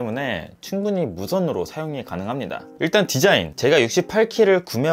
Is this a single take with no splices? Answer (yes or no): no